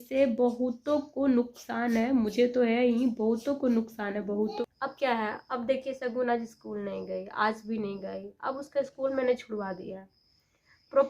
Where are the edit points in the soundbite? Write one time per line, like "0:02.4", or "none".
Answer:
0:04.6